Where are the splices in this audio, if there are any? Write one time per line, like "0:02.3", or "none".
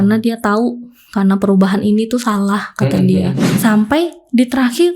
0:03.4